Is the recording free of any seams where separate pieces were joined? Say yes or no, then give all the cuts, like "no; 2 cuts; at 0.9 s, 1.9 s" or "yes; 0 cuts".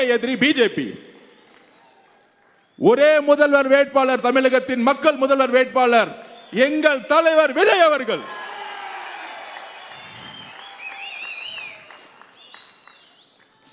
yes; 0 cuts